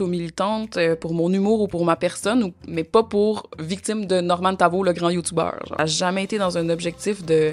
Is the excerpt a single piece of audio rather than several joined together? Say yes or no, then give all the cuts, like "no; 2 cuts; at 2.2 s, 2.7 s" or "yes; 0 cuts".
no; 1 cut; at 5.7 s